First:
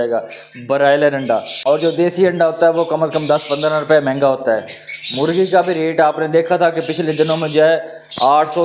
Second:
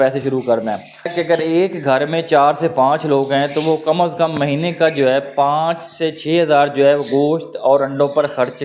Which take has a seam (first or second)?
second